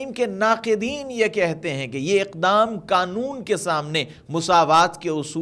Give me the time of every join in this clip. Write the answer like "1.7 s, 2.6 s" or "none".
none